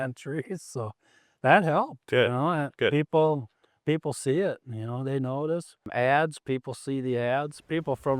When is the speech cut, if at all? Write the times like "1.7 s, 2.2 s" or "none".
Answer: 5.9 s